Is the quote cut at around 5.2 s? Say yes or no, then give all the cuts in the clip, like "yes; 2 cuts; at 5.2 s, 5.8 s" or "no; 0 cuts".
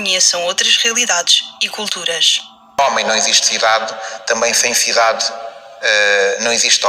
no; 1 cut; at 2.8 s